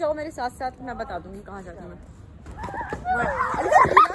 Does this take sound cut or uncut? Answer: cut